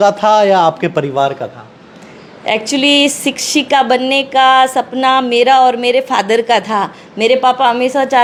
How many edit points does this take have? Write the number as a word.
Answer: zero